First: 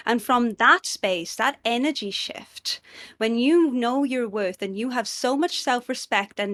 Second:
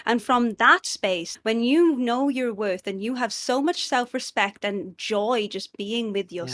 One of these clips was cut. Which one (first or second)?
second